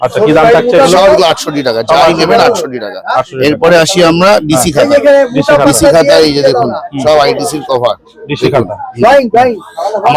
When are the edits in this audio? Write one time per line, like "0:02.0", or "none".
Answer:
none